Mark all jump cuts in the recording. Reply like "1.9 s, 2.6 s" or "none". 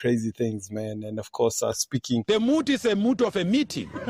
2.2 s